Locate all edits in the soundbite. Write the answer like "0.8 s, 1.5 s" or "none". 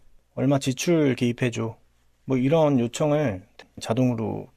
3.5 s